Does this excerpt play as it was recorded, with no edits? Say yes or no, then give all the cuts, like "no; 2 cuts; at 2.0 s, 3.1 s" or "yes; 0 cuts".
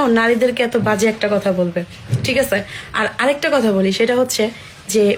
yes; 0 cuts